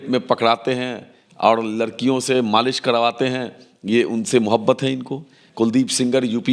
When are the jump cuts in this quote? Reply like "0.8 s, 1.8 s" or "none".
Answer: 5.4 s